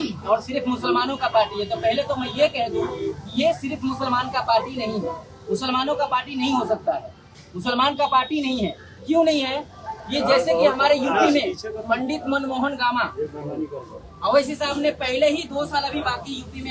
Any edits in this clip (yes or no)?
no